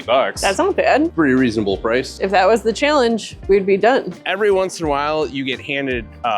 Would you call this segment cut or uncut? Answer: cut